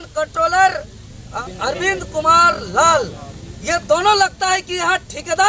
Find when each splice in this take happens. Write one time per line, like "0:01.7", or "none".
0:01.2